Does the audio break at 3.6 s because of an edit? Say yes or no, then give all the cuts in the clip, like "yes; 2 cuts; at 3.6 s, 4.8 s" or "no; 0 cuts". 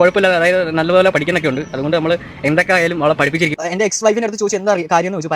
yes; 1 cut; at 3.6 s